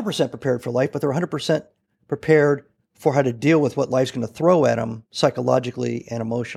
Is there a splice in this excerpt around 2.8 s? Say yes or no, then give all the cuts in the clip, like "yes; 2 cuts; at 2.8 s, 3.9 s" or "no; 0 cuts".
no; 0 cuts